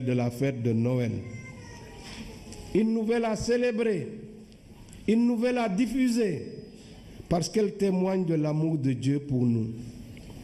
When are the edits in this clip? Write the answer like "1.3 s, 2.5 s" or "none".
none